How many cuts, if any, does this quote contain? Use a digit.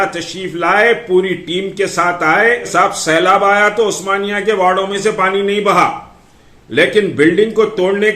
1